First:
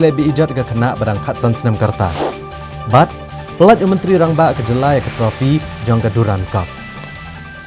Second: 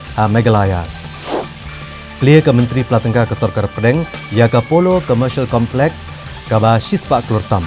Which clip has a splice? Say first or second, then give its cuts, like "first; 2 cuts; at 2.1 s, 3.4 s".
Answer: first; 1 cut; at 6.7 s